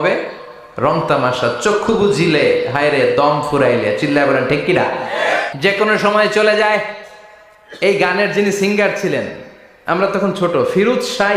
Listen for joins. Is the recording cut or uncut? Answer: cut